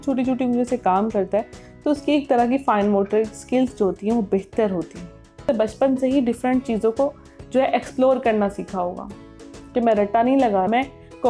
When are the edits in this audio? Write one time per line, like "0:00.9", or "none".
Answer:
0:05.5